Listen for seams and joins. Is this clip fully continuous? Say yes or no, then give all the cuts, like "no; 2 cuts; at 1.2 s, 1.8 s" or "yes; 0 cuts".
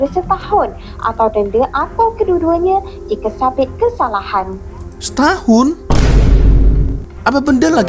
yes; 0 cuts